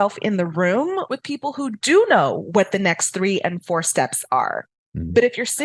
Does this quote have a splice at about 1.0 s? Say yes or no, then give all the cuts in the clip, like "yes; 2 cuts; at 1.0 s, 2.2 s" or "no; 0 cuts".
yes; 1 cut; at 1.0 s